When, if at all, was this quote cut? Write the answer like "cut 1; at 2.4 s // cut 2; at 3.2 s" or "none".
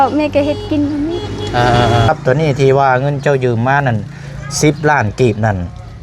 cut 1; at 2.1 s